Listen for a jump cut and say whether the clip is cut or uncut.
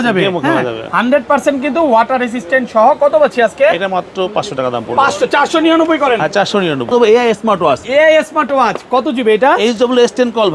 cut